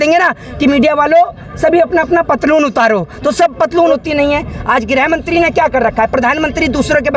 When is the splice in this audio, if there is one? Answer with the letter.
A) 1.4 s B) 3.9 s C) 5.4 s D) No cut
B